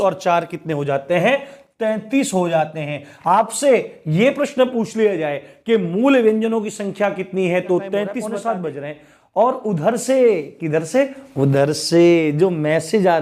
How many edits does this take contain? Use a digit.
1